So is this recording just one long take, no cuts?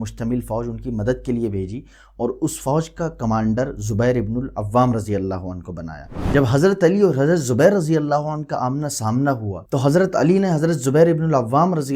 no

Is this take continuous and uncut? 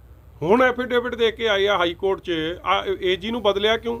yes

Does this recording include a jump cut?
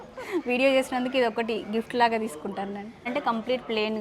yes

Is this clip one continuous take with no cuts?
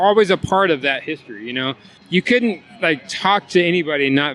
yes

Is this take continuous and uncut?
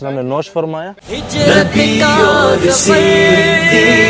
no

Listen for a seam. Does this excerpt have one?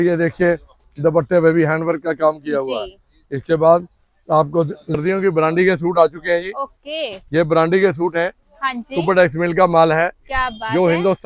yes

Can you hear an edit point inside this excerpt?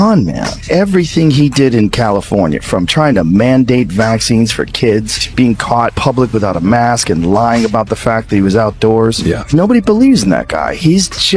no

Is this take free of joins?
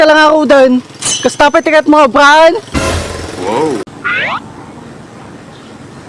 no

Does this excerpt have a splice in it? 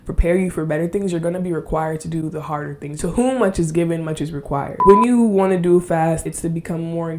yes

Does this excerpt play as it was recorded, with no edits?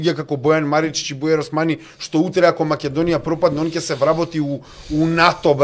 yes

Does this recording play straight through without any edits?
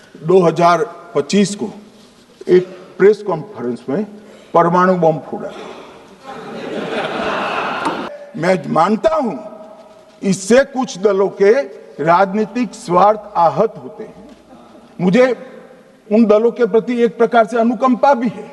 no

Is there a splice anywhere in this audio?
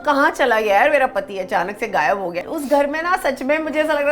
yes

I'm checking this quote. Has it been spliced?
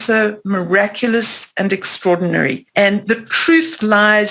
yes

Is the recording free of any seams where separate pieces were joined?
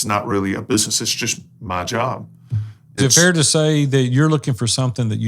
no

